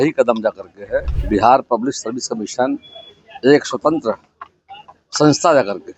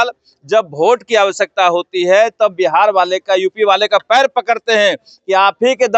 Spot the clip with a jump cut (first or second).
first